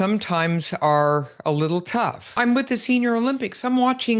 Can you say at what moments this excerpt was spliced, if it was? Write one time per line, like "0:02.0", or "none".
0:02.4